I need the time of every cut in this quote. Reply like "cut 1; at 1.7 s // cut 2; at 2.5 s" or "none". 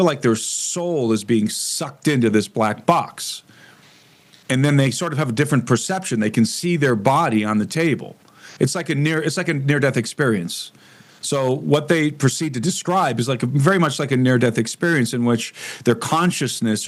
none